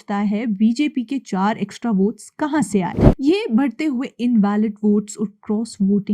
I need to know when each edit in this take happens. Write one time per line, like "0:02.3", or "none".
0:03.0